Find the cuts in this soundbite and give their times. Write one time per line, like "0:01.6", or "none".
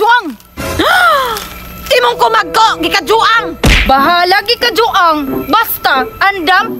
none